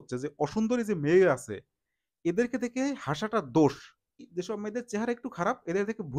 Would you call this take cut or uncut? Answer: cut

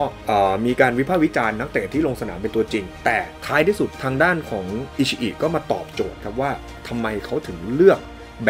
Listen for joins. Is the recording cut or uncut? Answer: cut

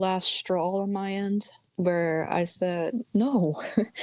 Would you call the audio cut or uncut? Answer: cut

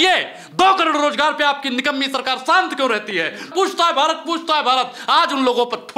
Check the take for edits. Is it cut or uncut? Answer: cut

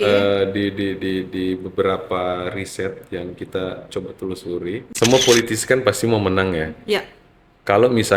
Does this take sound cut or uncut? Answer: cut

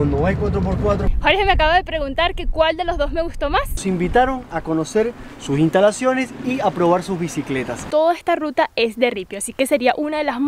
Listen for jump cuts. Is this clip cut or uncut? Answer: cut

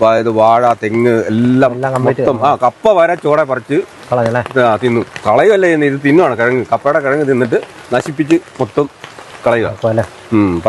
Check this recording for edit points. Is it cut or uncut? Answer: uncut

